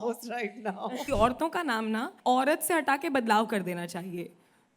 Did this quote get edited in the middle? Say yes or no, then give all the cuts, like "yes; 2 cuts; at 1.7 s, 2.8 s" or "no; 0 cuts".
yes; 2 cuts; at 1.1 s, 2.1 s